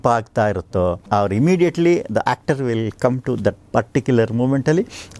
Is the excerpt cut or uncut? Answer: cut